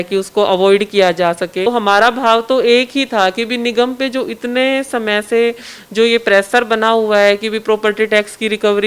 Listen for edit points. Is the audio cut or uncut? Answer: cut